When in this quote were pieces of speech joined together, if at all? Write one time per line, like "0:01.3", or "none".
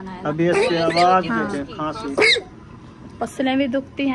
none